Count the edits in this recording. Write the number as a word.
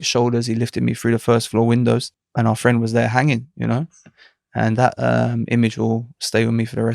one